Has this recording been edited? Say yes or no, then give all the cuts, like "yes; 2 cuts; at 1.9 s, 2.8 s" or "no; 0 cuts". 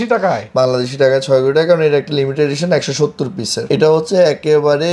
no; 0 cuts